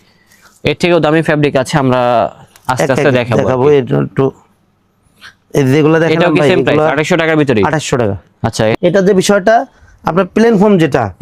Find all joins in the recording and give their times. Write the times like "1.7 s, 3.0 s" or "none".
8.8 s